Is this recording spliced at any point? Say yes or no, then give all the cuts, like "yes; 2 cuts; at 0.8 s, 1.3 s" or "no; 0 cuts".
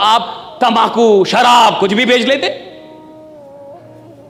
no; 0 cuts